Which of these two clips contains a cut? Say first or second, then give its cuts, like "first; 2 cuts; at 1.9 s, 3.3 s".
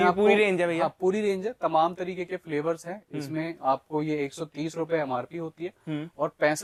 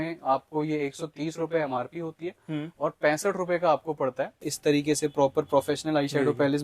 second; 1 cut; at 4.5 s